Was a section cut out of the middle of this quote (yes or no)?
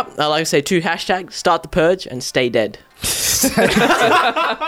no